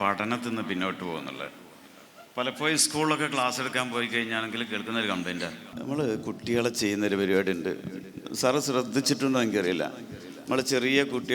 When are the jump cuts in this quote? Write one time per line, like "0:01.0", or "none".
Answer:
0:05.7